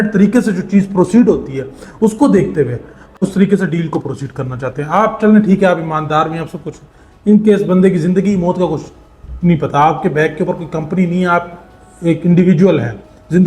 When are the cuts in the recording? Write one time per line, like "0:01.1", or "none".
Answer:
0:03.2